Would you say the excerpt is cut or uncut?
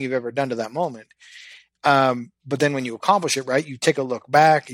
uncut